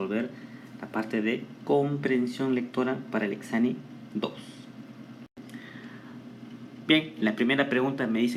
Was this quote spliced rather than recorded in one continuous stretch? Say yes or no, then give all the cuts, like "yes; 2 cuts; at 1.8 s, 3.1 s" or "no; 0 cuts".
no; 0 cuts